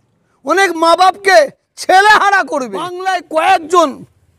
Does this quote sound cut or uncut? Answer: cut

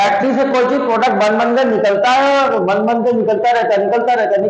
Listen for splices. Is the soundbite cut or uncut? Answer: uncut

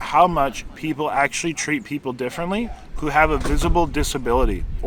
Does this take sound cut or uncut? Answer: uncut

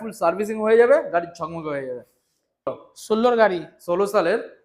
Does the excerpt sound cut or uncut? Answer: cut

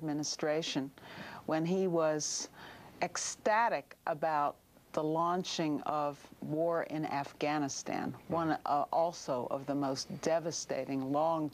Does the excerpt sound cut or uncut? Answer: uncut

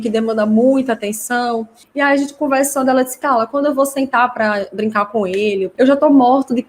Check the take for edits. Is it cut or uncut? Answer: cut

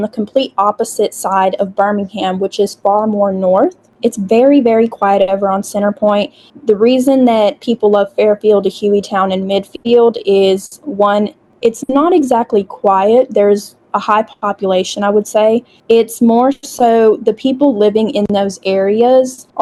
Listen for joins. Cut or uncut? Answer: uncut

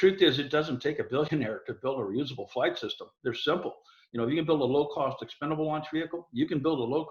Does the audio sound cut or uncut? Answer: cut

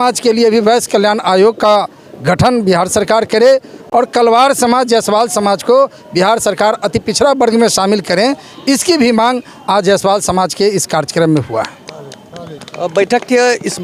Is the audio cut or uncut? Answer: uncut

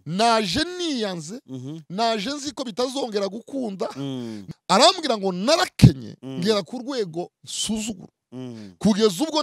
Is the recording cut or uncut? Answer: cut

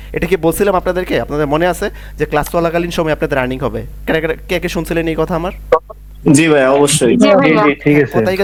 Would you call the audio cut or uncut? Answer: uncut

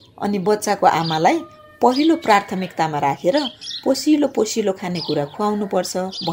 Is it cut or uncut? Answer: uncut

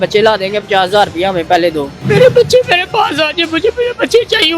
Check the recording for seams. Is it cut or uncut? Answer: cut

